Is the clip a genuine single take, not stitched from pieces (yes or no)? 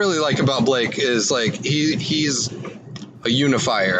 yes